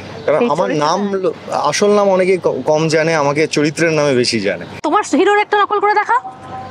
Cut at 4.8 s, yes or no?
yes